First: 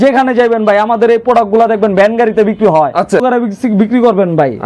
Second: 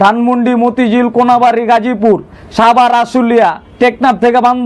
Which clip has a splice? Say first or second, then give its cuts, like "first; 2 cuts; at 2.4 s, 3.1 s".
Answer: first; 1 cut; at 3.2 s